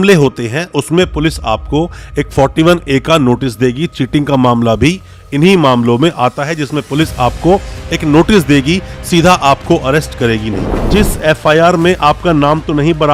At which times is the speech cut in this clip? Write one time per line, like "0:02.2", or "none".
0:10.9